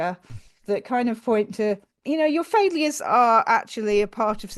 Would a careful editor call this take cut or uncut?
uncut